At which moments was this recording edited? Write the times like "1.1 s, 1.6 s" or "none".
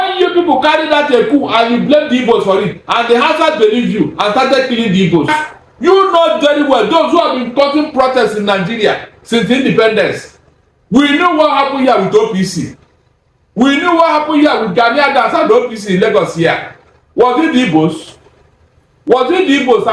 5.3 s